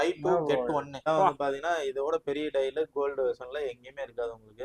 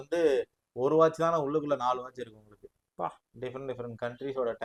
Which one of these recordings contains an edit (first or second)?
first